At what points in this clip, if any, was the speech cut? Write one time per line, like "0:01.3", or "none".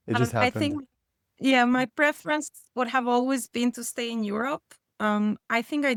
none